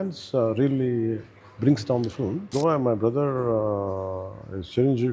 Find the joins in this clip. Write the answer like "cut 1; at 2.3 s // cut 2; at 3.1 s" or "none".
cut 1; at 2.5 s